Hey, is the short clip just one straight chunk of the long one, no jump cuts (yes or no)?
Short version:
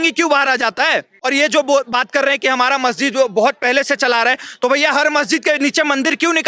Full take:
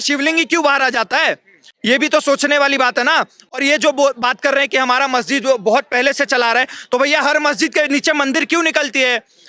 no